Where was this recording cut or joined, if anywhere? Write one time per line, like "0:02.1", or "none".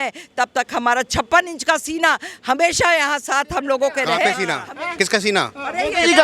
0:04.4